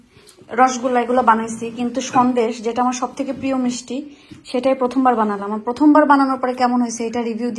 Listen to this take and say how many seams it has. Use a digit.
0